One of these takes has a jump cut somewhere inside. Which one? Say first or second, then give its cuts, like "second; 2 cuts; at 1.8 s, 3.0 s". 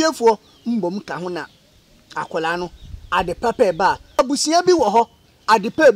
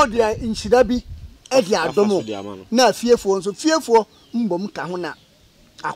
first; 1 cut; at 4.2 s